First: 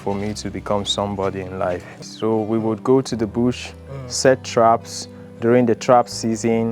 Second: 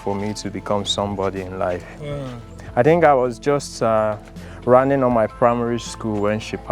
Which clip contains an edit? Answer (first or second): first